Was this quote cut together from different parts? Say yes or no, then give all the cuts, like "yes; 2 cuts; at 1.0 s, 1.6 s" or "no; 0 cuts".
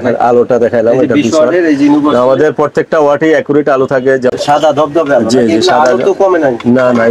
yes; 1 cut; at 4.3 s